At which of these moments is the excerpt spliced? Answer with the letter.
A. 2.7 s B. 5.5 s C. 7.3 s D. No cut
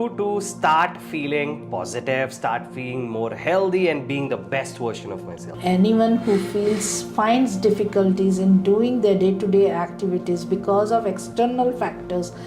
B